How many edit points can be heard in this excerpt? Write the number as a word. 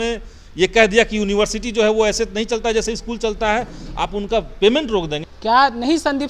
one